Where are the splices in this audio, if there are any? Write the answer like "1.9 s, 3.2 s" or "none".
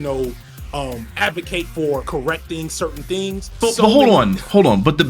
3.6 s